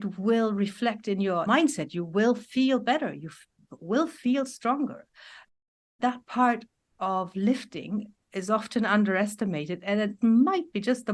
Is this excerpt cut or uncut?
cut